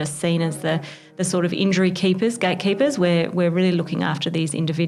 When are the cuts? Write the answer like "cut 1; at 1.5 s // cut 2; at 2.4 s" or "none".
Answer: none